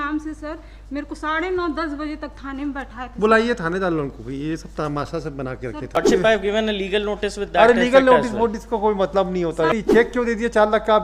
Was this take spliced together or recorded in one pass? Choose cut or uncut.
cut